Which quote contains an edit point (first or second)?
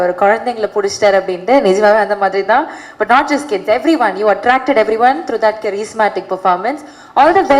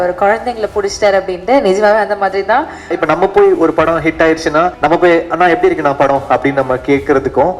second